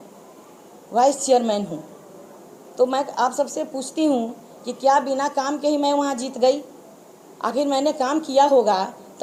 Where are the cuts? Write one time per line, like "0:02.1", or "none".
none